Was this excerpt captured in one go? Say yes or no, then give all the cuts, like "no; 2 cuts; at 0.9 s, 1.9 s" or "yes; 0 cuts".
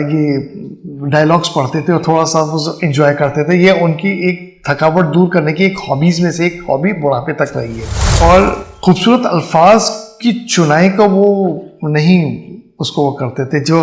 no; 1 cut; at 8.1 s